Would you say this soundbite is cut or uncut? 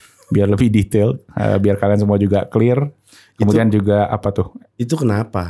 uncut